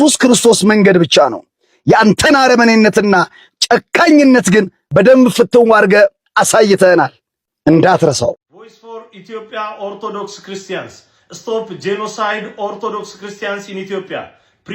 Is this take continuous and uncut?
no; 1 cut; at 8.4 s

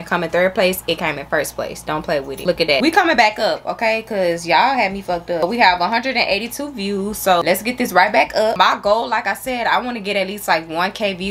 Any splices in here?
no; 0 cuts

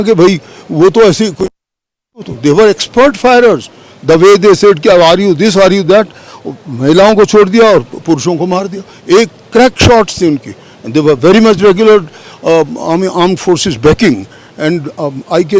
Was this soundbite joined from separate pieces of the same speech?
no; 0 cuts

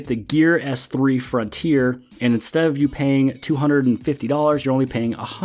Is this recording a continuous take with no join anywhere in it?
yes; 0 cuts

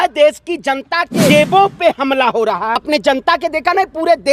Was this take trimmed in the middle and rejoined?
yes; 2 cuts; at 1.3 s, 2.8 s

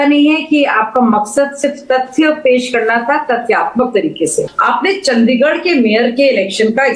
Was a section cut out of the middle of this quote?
yes; 1 cut; at 4.5 s

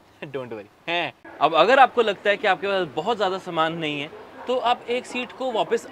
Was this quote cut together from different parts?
yes; 1 cut; at 1.2 s

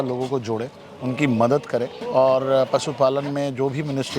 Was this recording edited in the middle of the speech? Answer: no; 0 cuts

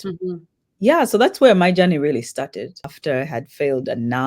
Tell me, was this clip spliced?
yes; 1 cut; at 2.8 s

